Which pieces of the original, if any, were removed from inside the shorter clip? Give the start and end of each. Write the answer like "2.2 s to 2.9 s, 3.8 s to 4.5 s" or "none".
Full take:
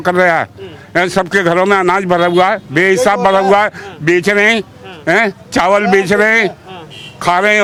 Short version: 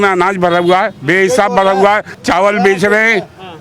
3.8 s to 5.4 s

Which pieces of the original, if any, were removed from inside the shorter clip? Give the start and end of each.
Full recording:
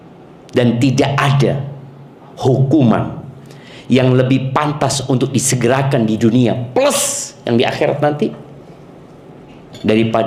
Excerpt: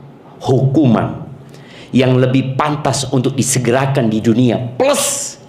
none

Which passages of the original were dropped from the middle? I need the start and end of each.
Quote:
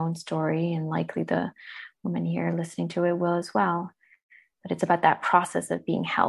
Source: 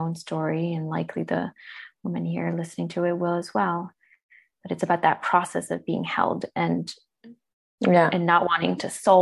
none

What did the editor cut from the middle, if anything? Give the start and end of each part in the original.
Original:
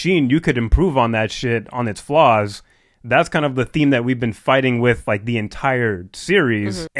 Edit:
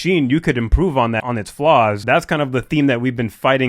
1.2 s to 1.7 s, 2.5 s to 3.0 s

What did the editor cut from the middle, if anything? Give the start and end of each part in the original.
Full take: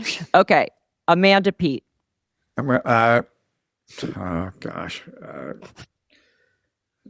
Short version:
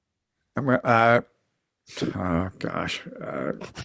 none

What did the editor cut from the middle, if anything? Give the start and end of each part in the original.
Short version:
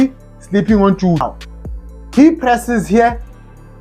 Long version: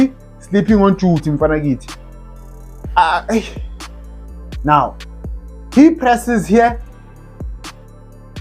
1.2 s to 4.8 s

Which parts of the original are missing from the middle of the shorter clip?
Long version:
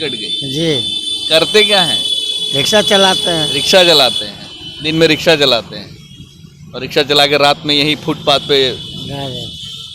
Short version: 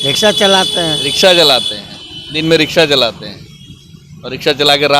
none

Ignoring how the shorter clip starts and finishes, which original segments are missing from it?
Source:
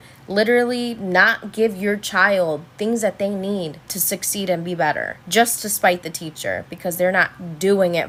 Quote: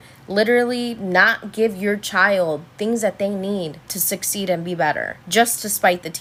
none

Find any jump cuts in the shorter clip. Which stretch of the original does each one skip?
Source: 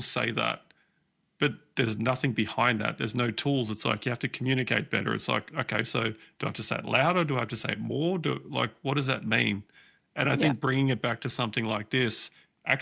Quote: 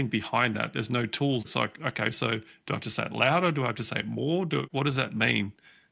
3.7 s to 5.2 s, 8.4 s to 8.8 s

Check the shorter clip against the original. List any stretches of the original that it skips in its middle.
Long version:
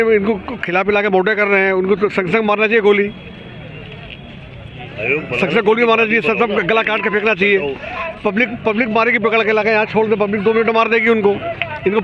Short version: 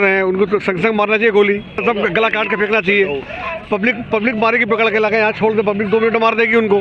3.3 s to 6.3 s

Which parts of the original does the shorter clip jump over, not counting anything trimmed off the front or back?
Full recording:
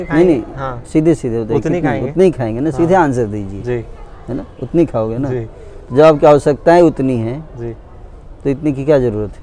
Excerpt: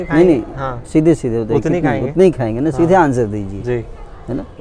none

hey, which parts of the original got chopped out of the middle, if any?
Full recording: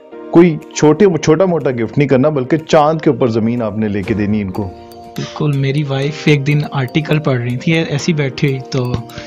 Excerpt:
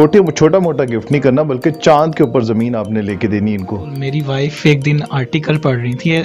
4.9 s to 5.6 s

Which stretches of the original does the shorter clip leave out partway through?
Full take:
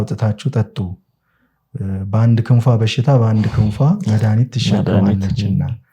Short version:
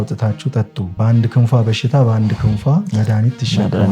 0.9 s to 2.1 s

